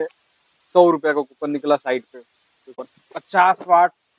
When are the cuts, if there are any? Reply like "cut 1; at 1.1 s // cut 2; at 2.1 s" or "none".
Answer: cut 1; at 2.8 s

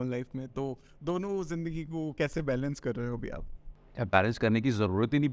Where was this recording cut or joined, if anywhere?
none

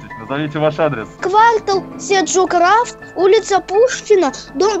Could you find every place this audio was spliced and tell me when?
cut 1; at 1.1 s

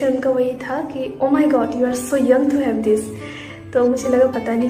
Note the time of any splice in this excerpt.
none

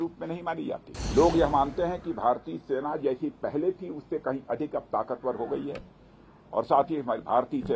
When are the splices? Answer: cut 1; at 0.9 s

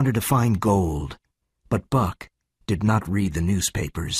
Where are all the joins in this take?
none

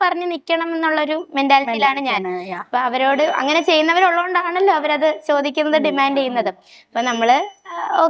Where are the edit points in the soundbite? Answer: none

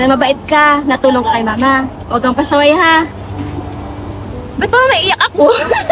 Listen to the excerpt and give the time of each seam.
none

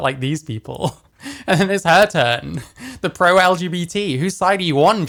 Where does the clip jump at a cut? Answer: none

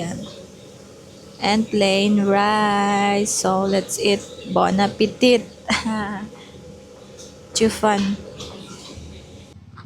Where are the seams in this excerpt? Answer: none

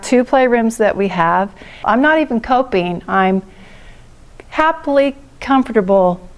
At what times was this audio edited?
cut 1; at 1.8 s

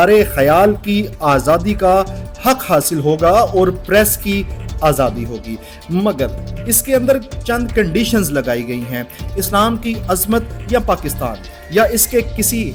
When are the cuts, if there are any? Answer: none

